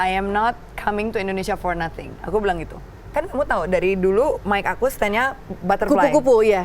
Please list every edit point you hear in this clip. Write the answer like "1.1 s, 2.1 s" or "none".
3.1 s